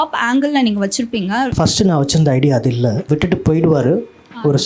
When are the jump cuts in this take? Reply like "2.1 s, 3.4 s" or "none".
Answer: 1.5 s, 3.0 s

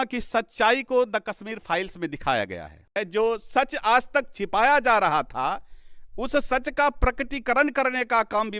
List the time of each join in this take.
3.0 s

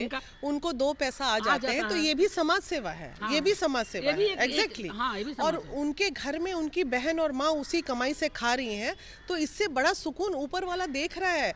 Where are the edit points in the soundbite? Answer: none

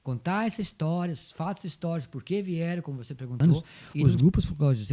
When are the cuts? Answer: 3.4 s

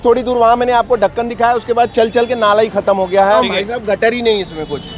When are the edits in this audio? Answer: 3.4 s

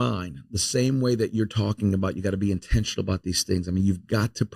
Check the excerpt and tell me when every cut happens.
none

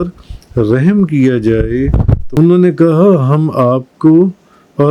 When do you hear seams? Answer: 2.2 s

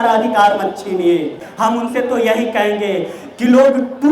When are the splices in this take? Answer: 1.4 s

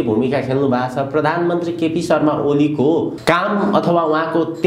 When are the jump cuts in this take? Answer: 3.1 s

